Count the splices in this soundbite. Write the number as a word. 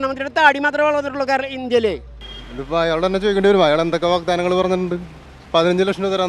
one